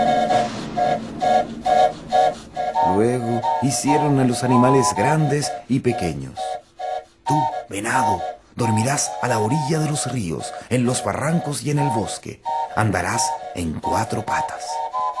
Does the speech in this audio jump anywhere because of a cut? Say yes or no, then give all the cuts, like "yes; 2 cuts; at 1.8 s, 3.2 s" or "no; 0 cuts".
yes; 1 cut; at 6.6 s